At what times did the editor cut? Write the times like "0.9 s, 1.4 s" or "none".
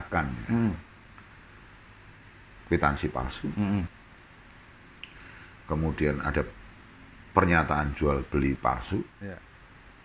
9.2 s

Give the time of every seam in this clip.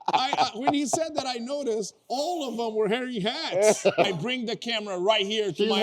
4.1 s

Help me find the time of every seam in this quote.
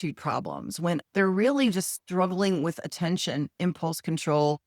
1.0 s

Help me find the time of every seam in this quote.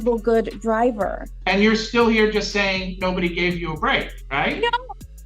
1.3 s, 4.2 s

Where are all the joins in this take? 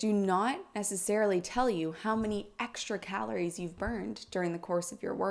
none

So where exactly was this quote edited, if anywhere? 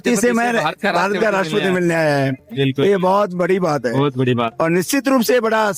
none

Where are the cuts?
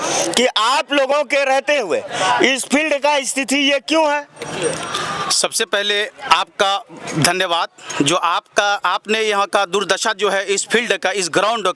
none

